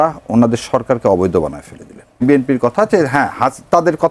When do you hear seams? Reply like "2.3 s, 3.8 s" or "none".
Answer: 2.2 s